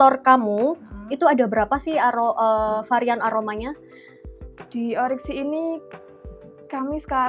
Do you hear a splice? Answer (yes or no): no